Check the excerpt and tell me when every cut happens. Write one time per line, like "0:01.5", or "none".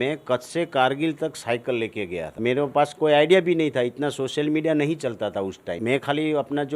0:02.4
0:05.7